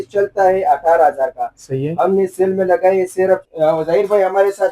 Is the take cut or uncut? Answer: cut